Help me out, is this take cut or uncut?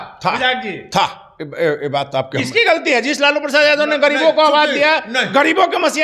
uncut